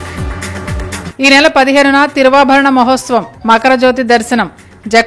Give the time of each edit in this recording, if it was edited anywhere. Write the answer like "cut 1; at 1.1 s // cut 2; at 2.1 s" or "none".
cut 1; at 1.0 s

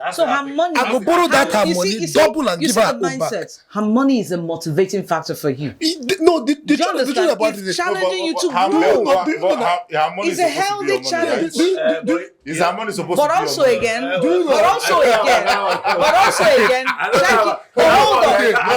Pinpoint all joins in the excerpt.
none

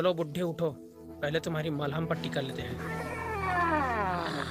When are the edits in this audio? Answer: none

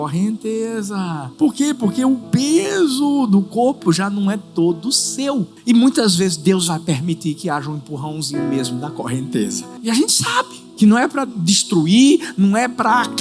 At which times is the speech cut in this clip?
cut 1; at 1.2 s // cut 2; at 5.5 s // cut 3; at 9.7 s // cut 4; at 10.6 s

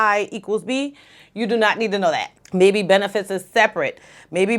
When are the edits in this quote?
cut 1; at 2.3 s

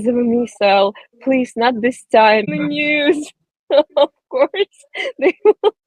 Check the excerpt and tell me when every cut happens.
cut 1; at 2.5 s

